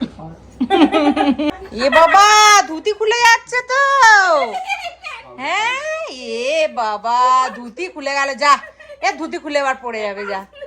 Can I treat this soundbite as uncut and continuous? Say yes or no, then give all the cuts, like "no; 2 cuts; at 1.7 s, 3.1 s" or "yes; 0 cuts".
no; 1 cut; at 1.6 s